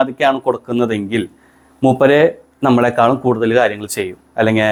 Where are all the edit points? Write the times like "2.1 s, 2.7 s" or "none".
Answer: none

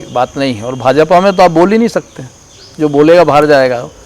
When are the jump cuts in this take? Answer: none

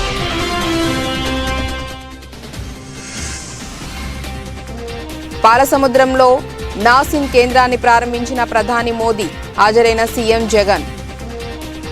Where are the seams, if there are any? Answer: 3.8 s, 10.9 s

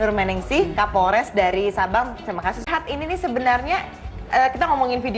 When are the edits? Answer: 1.9 s

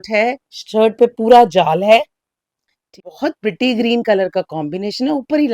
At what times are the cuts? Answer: 3.0 s

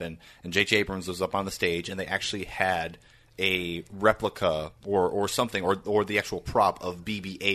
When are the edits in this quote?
none

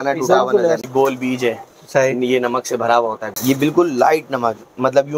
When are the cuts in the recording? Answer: 0.8 s, 3.3 s

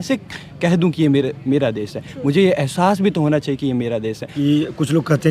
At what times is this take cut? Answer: 4.3 s

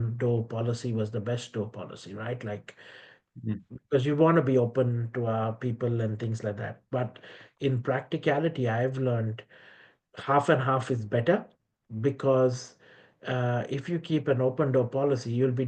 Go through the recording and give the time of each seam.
none

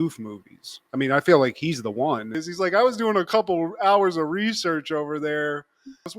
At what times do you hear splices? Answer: 2.4 s

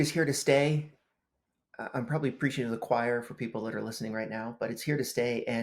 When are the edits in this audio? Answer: none

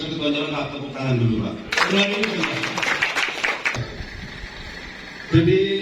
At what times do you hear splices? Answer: 3.8 s

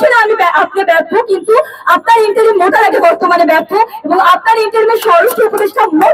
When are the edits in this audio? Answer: none

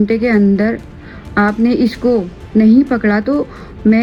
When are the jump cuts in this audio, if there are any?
none

